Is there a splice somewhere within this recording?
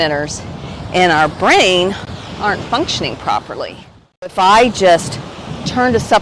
yes; 1 cut; at 4.3 s

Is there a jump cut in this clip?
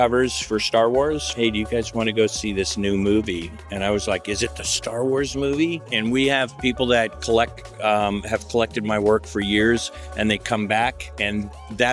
yes; 2 cuts; at 1.3 s, 5.9 s

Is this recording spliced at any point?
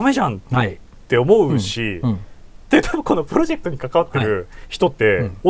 yes; 1 cut; at 4.6 s

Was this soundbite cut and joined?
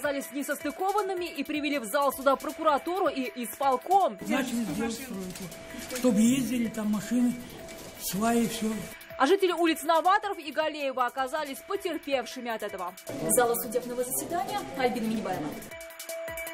yes; 2 cuts; at 13.0 s, 15.6 s

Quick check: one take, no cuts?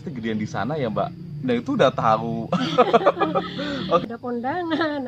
no; 1 cut; at 4.0 s

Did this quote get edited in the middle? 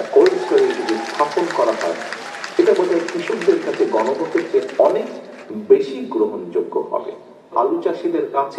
yes; 1 cut; at 7.5 s

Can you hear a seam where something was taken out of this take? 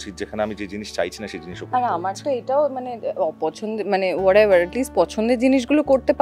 no; 0 cuts

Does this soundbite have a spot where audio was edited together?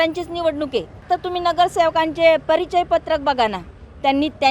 yes; 1 cut; at 1.0 s

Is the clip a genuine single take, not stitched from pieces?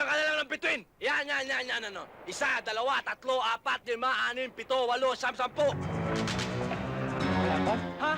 no; 1 cut; at 5.8 s

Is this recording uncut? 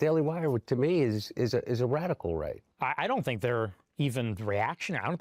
yes; 0 cuts

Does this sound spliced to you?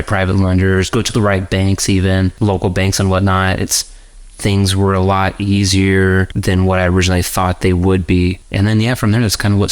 yes; 3 cuts; at 2.3 s, 6.3 s, 8.4 s

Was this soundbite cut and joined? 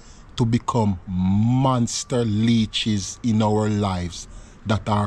no; 0 cuts

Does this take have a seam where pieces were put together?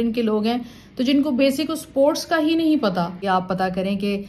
yes; 1 cut; at 3.2 s

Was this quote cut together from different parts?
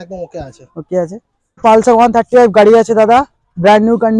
yes; 1 cut; at 1.6 s

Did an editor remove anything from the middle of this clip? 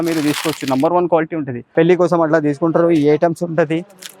yes; 1 cut; at 1.6 s

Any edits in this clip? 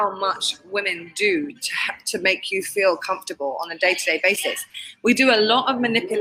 no; 0 cuts

